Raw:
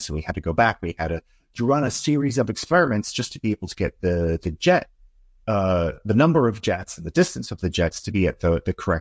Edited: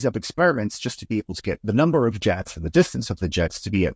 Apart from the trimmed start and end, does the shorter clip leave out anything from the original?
yes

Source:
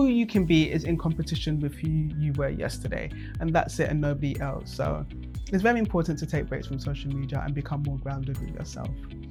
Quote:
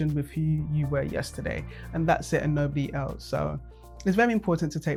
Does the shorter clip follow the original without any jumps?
yes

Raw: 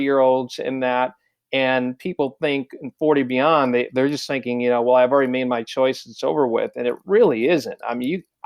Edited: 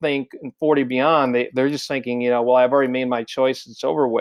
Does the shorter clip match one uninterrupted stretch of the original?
yes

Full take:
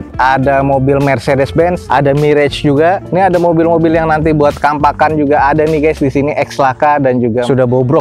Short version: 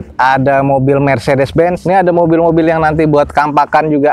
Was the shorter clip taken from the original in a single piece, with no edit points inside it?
no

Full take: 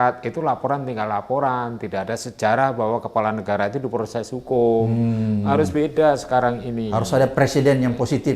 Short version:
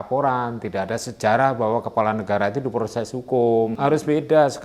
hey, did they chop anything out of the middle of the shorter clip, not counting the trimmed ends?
yes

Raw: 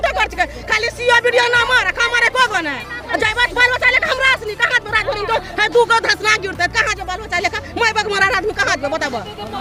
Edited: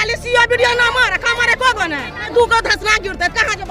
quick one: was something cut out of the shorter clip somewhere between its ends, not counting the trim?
yes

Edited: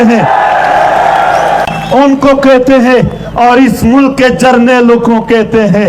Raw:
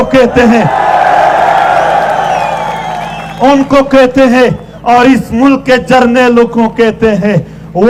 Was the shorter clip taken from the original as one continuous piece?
no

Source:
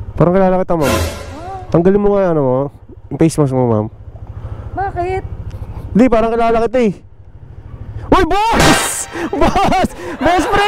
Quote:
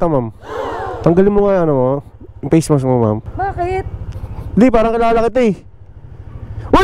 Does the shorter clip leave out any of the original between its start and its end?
yes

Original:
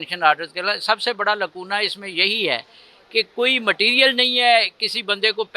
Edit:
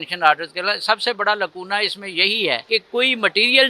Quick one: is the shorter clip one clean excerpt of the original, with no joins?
no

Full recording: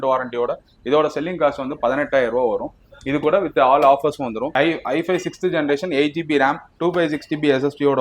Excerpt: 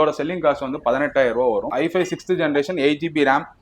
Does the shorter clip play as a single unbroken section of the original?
no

